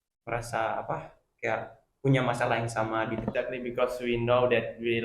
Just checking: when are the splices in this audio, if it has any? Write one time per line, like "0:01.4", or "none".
0:03.3